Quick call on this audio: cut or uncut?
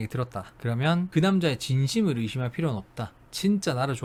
uncut